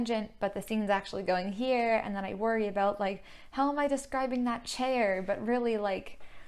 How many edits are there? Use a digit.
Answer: 0